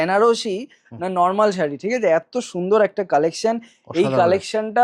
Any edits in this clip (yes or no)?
no